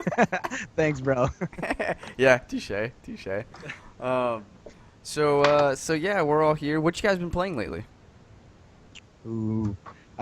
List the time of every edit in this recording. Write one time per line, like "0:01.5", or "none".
0:04.3